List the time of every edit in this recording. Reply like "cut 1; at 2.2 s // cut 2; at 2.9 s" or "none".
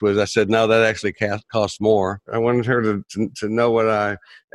cut 1; at 2.3 s